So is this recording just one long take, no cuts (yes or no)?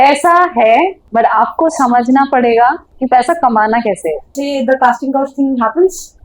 no